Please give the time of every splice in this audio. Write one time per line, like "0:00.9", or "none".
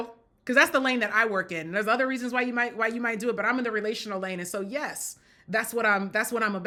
none